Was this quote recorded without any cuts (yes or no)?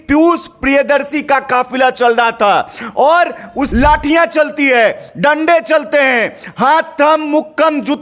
no